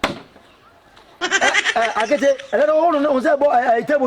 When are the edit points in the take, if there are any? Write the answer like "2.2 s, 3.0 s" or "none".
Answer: none